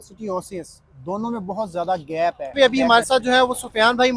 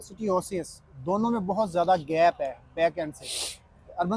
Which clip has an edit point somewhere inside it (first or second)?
first